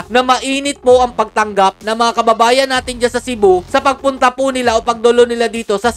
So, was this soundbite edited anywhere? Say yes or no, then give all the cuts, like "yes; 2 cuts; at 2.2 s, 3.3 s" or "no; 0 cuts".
no; 0 cuts